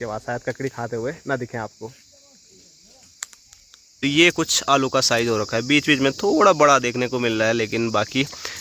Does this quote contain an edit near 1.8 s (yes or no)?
no